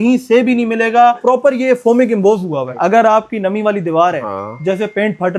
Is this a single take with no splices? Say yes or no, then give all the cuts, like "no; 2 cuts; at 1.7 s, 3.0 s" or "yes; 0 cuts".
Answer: no; 2 cuts; at 1.2 s, 2.7 s